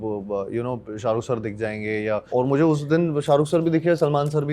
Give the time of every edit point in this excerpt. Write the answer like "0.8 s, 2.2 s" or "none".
2.3 s